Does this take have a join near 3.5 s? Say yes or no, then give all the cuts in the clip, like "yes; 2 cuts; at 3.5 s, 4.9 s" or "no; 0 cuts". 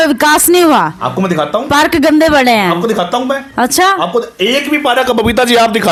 no; 0 cuts